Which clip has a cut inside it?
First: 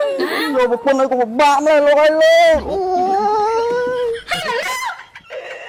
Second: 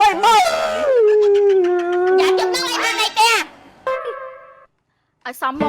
second; 1 cut; at 3.9 s

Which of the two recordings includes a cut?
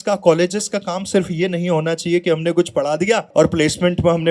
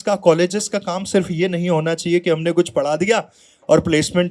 first; 1 cut; at 3.2 s

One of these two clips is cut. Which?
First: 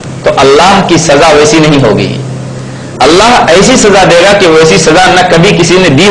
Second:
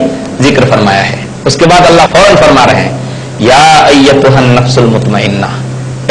second; 1 cut; at 1.2 s

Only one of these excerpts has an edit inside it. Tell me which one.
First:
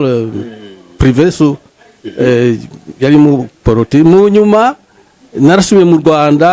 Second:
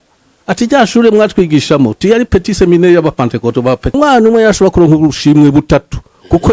second; 1 cut; at 4.0 s

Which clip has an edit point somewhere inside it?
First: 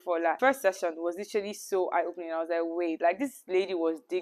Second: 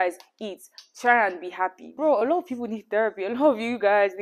second; 1 cut; at 2.0 s

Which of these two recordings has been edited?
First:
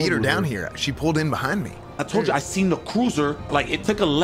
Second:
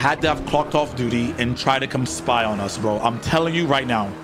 first; 2 cuts; at 1.8 s, 3.5 s

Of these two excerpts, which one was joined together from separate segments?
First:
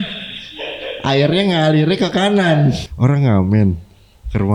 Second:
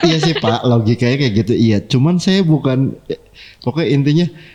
first; 1 cut; at 2.9 s

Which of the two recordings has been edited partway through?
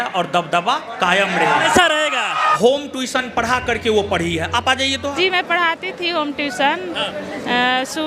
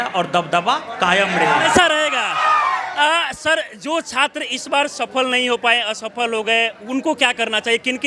first; 2 cuts; at 2.5 s, 5.1 s

